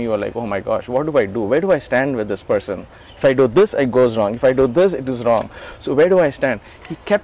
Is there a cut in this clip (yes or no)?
no